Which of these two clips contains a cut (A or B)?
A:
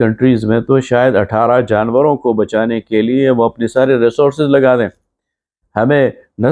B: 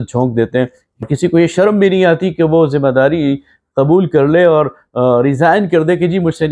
B